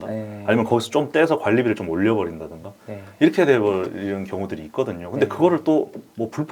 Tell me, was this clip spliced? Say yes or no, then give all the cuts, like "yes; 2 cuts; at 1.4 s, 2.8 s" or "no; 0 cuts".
no; 0 cuts